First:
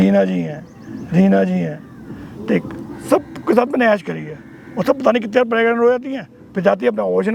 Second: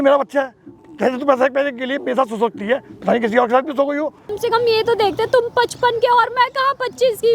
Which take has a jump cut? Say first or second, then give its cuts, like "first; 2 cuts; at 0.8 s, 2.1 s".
second; 1 cut; at 4.3 s